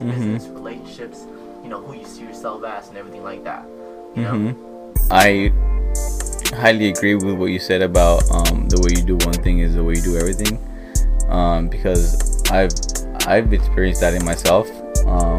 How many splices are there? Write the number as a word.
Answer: one